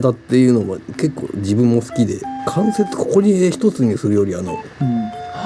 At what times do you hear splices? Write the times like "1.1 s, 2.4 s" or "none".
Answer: 2.3 s

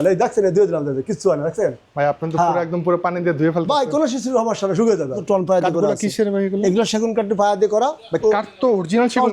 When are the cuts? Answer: 5.2 s

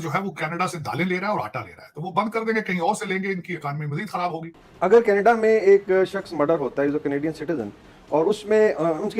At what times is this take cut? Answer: 4.6 s

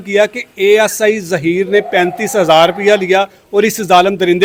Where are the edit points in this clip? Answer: none

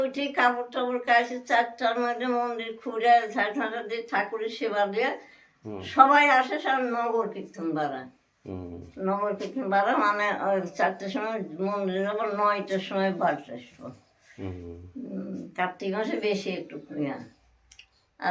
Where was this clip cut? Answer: none

